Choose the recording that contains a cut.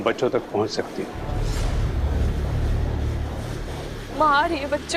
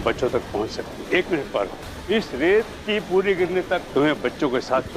second; 3 cuts; at 1.0 s, 1.9 s, 3.9 s

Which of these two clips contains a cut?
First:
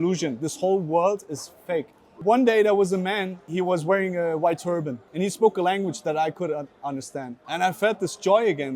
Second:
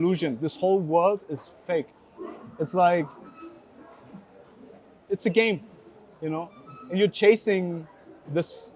first; 4 cuts; at 2.1 s, 3.4 s, 5.0 s, 7.4 s

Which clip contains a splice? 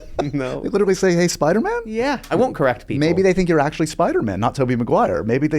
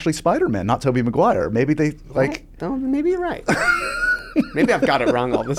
first; 1 cut; at 2.2 s

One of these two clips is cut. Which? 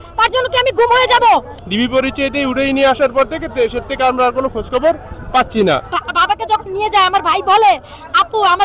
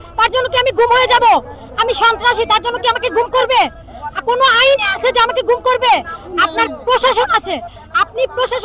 first; 2 cuts; at 1.6 s, 6.0 s

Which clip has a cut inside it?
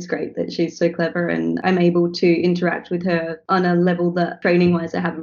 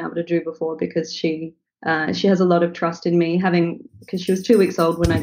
first; 3 cuts; at 1.6 s, 3.4 s, 4.3 s

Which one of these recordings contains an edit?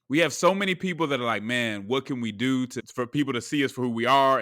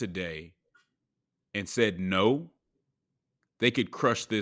first; 1 cut; at 2.8 s

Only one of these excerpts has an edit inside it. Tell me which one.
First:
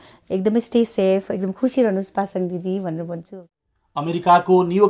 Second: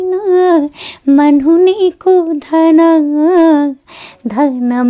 first; 1 cut; at 3.3 s

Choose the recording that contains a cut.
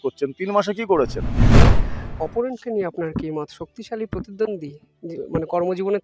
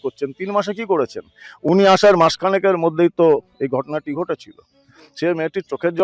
first; 1 cut; at 1.6 s

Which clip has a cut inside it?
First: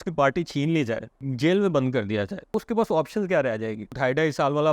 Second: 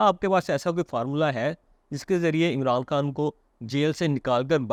first; 3 cuts; at 1.3 s, 2.5 s, 4.0 s

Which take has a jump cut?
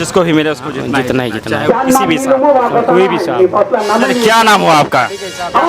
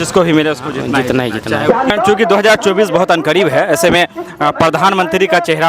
second; 1 cut; at 1.9 s

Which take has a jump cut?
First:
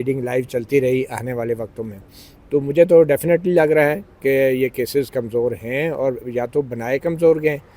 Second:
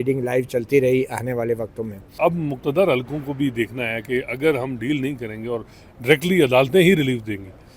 second; 1 cut; at 2.2 s

